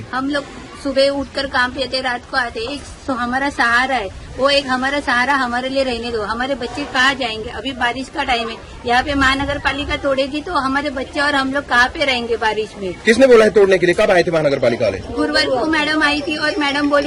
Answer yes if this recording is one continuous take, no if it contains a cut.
yes